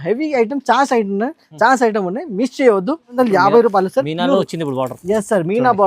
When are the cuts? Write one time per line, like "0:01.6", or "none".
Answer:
0:03.1